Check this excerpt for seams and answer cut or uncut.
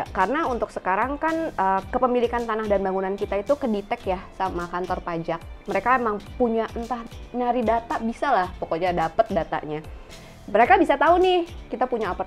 uncut